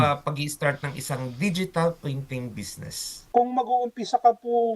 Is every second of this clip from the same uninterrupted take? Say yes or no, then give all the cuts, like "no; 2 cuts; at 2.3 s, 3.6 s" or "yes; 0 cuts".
no; 1 cut; at 3.2 s